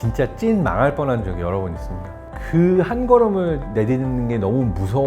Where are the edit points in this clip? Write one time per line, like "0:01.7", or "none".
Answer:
0:02.2